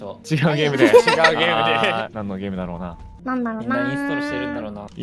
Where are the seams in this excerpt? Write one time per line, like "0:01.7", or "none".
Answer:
0:02.1
0:03.2